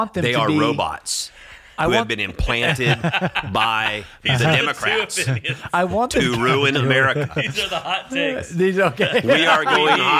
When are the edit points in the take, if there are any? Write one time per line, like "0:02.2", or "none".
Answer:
none